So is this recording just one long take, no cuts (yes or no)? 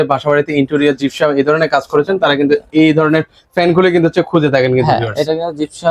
yes